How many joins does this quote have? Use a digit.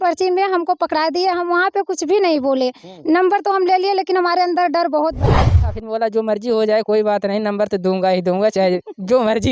1